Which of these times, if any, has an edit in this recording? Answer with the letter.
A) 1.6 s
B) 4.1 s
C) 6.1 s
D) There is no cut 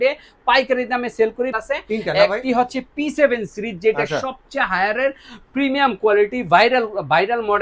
A